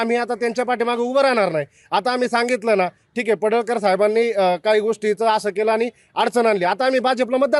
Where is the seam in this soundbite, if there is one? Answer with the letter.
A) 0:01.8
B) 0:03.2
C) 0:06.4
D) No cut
D